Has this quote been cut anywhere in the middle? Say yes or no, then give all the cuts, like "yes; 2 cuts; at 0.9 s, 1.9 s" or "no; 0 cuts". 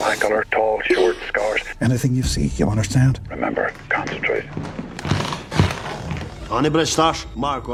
no; 0 cuts